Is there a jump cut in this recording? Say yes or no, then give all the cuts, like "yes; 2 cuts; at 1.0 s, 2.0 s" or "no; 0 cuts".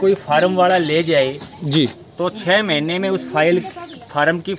no; 0 cuts